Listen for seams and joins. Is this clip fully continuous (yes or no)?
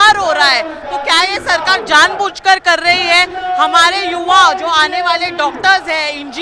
yes